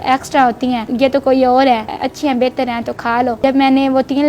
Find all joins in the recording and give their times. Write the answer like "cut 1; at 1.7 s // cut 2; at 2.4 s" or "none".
cut 1; at 0.9 s // cut 2; at 2.0 s // cut 3; at 3.4 s

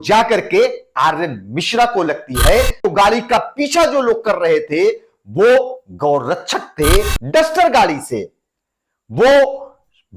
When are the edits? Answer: cut 1; at 2.8 s // cut 2; at 7.2 s

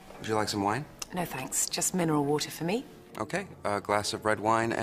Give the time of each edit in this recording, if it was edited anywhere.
cut 1; at 1.0 s // cut 2; at 3.0 s

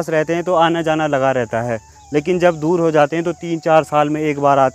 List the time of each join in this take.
none

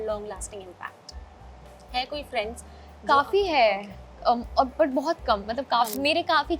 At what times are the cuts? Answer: none

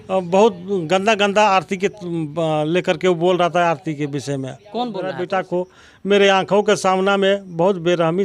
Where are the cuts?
cut 1; at 5.2 s

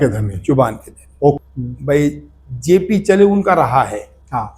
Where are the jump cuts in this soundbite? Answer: cut 1; at 1.4 s

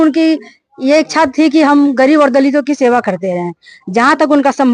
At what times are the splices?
none

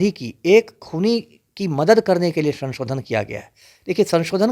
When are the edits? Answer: none

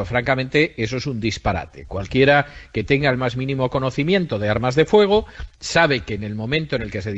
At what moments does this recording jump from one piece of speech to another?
none

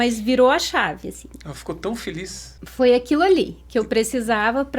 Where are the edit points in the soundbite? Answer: cut 1; at 2.5 s

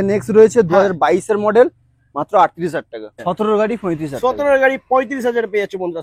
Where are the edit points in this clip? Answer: cut 1; at 3.2 s

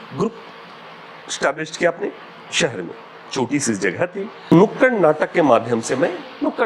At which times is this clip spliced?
cut 1; at 4.5 s

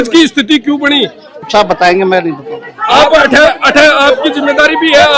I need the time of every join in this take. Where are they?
none

